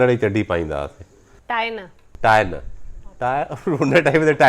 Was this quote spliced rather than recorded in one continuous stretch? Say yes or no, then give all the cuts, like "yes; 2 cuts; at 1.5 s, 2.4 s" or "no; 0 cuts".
yes; 1 cut; at 1.3 s